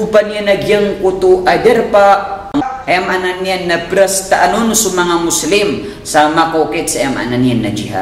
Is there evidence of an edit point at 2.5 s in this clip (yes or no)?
yes